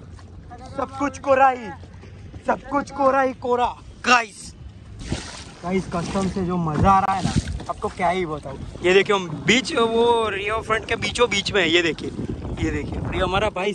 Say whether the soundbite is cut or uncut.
cut